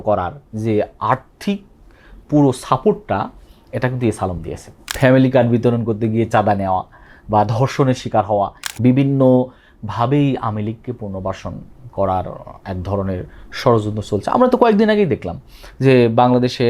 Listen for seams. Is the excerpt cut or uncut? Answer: cut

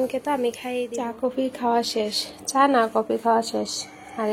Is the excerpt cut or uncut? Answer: cut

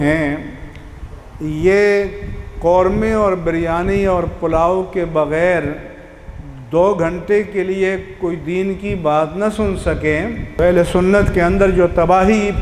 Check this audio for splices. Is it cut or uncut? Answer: cut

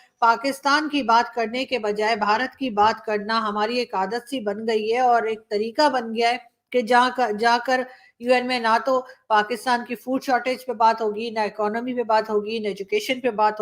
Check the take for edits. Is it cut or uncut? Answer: uncut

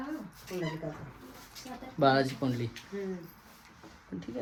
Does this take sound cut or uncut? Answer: uncut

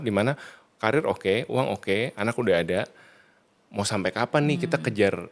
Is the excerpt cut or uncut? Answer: uncut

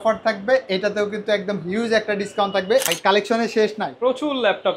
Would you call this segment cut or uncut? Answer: cut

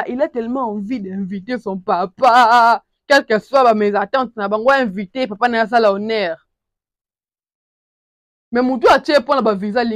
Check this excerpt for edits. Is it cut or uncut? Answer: uncut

